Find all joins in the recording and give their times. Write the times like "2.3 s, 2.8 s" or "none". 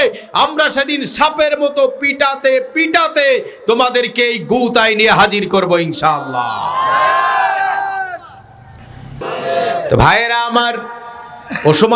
9.1 s